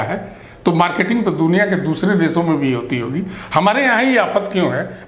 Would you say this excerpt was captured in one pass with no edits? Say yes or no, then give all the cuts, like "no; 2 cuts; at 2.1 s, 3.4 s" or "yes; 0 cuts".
yes; 0 cuts